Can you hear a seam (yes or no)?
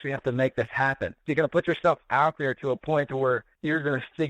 yes